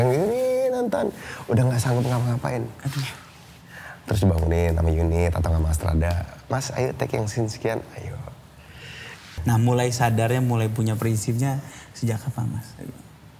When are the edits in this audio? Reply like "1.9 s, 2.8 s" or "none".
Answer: 9.3 s